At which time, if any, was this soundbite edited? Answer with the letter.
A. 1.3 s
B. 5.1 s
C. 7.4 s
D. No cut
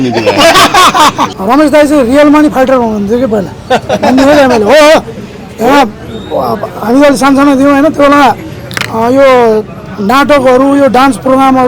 A